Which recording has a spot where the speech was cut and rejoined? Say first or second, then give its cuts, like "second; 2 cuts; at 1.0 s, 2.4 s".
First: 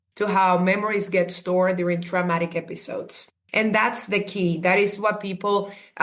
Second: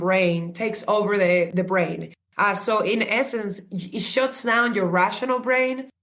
second; 1 cut; at 1.5 s